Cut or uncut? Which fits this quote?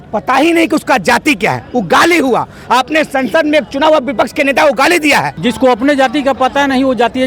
cut